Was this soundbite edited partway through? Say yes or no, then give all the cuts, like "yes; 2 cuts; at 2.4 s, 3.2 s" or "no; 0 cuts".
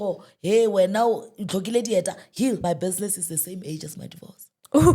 yes; 1 cut; at 2.6 s